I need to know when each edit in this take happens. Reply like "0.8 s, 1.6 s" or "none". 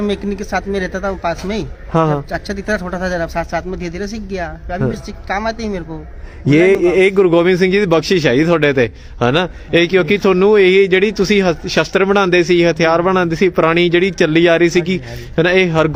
none